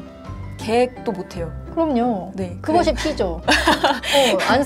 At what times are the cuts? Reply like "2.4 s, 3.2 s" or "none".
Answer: none